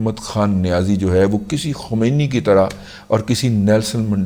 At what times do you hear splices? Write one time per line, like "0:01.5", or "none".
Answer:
none